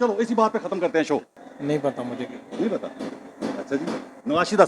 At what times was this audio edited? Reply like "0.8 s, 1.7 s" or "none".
1.4 s